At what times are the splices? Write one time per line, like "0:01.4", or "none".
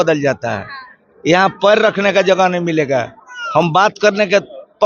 none